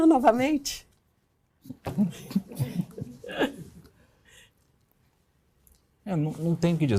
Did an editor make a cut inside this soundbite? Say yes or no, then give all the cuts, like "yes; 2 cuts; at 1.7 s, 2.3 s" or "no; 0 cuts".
no; 0 cuts